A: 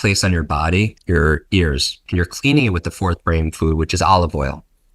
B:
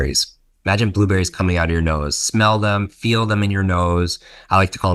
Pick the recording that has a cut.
A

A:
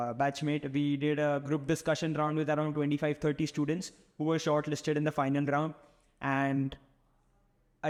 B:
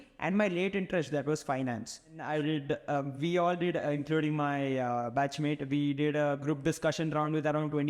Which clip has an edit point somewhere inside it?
B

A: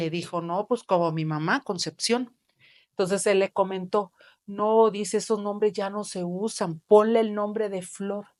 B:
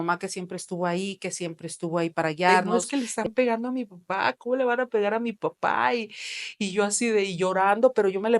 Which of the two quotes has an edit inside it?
B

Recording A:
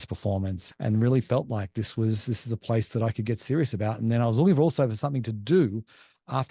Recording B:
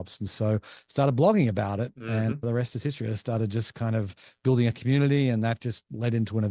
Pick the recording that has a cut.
B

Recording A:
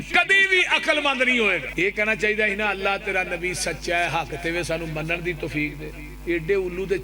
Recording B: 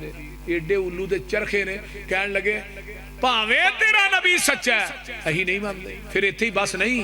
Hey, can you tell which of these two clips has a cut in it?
A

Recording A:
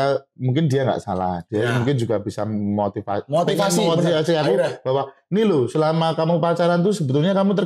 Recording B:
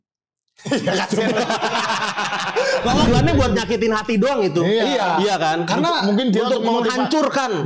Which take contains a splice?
B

